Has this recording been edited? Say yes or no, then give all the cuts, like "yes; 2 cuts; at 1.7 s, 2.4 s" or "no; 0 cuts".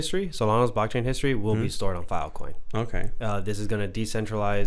no; 0 cuts